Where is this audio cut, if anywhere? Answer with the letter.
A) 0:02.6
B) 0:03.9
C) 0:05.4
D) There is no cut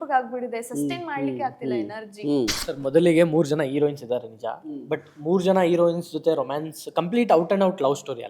A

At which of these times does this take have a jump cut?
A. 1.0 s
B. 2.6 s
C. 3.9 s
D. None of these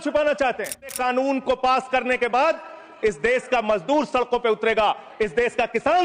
A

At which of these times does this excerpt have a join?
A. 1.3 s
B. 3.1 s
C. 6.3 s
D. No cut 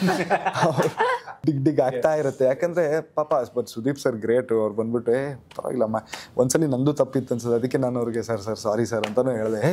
A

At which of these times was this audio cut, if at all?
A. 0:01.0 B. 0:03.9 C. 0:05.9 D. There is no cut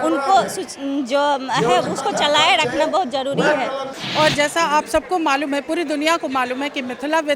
B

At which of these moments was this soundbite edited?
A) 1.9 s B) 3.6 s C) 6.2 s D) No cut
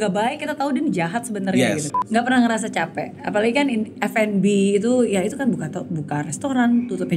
A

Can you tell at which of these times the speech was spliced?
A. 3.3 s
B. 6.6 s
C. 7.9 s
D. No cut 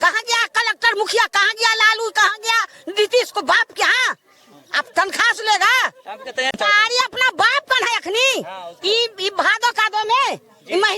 B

